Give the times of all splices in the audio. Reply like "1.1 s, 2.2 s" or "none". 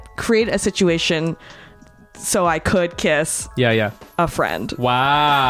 none